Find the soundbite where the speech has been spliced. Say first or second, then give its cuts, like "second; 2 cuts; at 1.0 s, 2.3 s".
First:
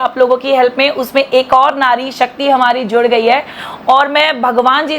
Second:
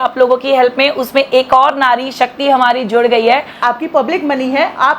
second; 1 cut; at 3.5 s